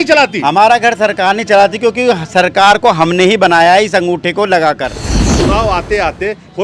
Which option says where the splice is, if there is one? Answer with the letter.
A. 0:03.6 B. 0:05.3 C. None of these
B